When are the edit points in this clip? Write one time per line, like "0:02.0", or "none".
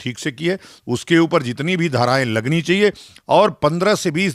none